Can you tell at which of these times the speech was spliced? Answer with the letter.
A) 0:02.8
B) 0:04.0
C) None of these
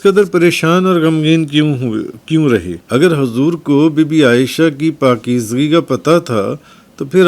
A